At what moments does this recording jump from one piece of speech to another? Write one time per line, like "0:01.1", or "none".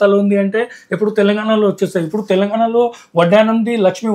none